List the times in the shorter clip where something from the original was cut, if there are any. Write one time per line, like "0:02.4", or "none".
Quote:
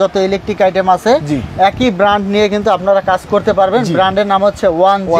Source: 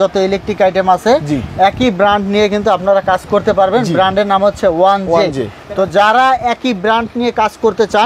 none